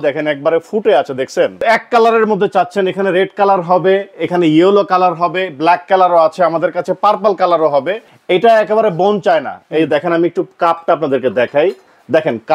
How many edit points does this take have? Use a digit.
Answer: 2